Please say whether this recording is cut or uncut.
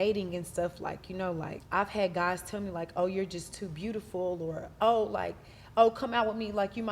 cut